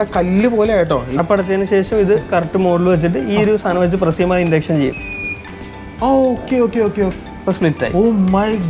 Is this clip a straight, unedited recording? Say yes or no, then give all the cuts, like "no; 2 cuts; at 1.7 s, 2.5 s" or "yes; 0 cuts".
no; 2 cuts; at 1.1 s, 7.1 s